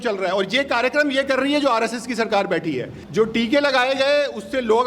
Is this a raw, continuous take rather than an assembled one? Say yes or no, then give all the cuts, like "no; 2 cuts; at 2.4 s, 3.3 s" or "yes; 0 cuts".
no; 1 cut; at 2.9 s